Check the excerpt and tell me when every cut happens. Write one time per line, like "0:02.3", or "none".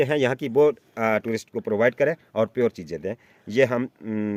none